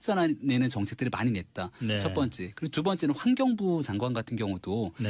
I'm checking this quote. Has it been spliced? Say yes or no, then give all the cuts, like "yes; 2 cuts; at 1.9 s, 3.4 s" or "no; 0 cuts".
no; 0 cuts